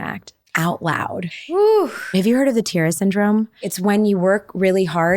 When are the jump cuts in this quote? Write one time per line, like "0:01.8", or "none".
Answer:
0:01.4
0:02.1
0:03.7